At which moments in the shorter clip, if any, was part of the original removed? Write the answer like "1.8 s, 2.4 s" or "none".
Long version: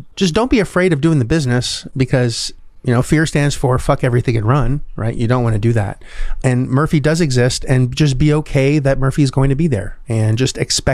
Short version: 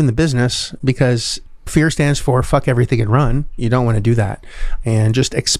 1.7 s, 3.5 s, 4.7 s